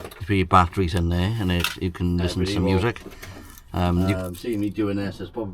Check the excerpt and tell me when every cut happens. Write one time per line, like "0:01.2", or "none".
0:04.2